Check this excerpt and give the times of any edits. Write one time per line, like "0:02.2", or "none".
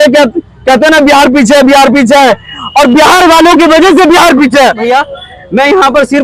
0:04.8